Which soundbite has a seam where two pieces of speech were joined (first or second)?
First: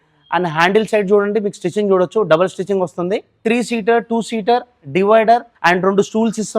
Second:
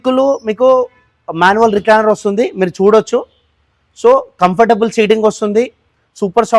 first